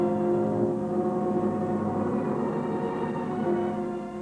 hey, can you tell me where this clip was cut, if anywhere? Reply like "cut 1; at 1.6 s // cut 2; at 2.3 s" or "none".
cut 1; at 1.0 s